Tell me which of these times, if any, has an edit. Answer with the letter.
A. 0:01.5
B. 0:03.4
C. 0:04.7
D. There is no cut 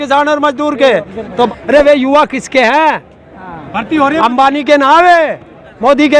A